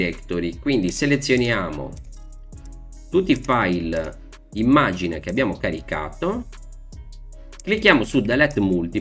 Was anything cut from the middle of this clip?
no; 0 cuts

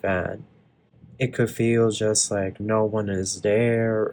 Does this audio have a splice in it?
no; 0 cuts

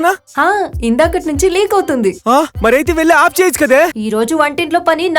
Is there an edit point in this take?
yes; 2 cuts; at 2.5 s, 4.0 s

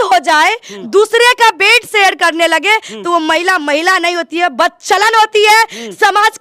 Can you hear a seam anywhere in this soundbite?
no; 0 cuts

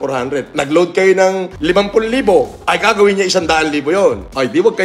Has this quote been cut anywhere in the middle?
no; 0 cuts

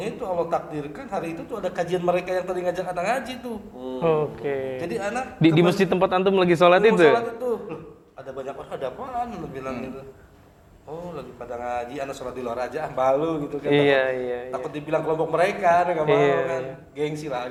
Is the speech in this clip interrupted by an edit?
no; 0 cuts

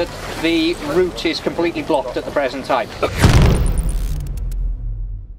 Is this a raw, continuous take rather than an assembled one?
no; 1 cut; at 3.1 s

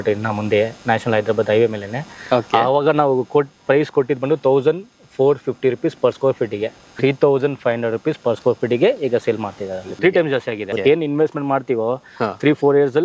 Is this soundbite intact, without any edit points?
no; 3 cuts; at 6.8 s, 9.8 s, 10.7 s

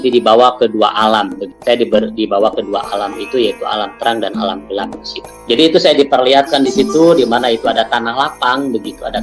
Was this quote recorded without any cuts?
yes; 0 cuts

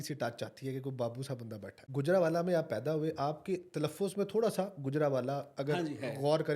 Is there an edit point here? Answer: yes; 1 cut; at 1.8 s

